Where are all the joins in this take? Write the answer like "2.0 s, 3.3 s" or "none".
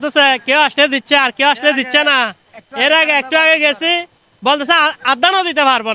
none